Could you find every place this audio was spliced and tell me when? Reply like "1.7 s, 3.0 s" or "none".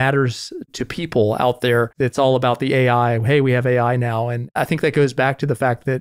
1.9 s, 4.4 s

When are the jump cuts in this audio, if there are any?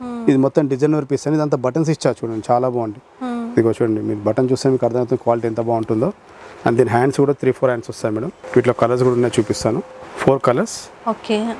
none

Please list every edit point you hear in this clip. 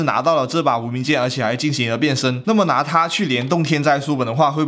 none

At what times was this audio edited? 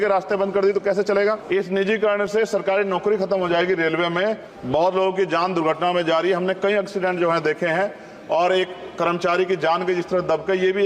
1.4 s, 4.5 s

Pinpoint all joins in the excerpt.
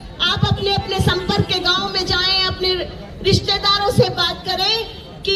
none

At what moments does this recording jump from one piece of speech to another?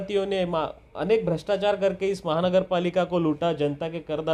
none

